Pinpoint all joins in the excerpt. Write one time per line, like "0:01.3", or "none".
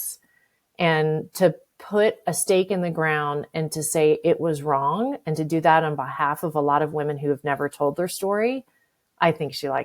none

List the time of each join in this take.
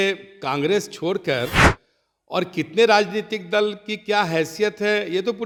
none

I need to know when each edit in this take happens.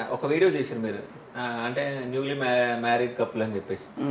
none

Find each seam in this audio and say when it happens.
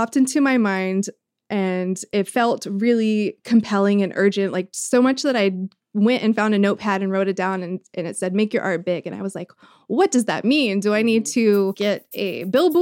0:11.8

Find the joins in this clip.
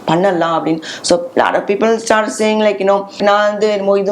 0:03.2

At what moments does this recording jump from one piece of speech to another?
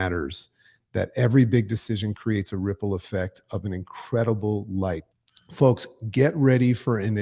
0:05.1

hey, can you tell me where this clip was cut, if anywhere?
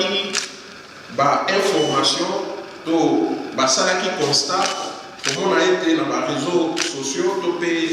none

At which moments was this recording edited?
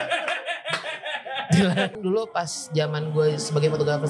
0:01.9

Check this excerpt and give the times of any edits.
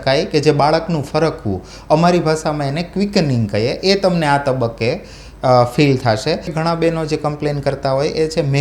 0:06.5

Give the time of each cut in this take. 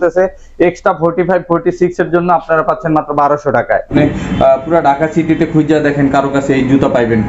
0:03.9

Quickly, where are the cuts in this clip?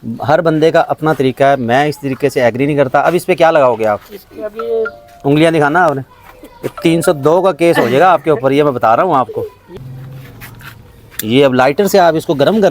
0:09.6

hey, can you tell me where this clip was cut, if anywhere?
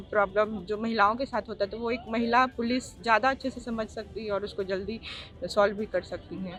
none

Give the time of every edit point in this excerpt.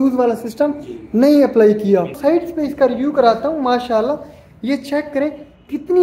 0:02.1

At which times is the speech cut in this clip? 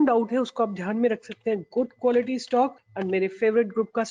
0:02.9

